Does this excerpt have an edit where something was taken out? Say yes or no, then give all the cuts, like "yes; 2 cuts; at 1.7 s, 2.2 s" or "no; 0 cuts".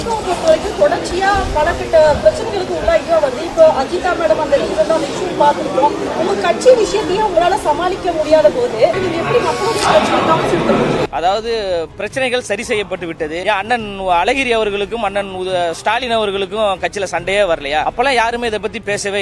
yes; 4 cuts; at 9.0 s, 11.1 s, 13.4 s, 17.9 s